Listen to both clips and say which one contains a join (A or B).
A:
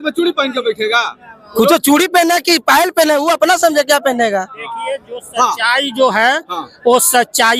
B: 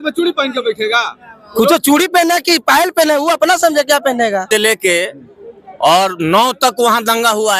B